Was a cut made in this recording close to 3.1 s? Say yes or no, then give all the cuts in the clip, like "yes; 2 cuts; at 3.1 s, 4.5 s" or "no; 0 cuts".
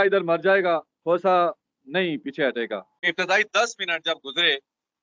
yes; 1 cut; at 3.1 s